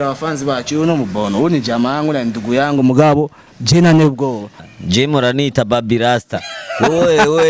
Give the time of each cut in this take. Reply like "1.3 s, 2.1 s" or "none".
4.5 s